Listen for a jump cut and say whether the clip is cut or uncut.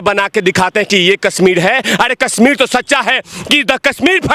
uncut